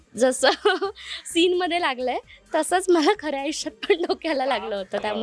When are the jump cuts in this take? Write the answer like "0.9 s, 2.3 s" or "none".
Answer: none